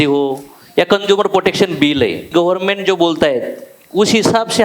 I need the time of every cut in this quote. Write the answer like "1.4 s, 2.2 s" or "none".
2.3 s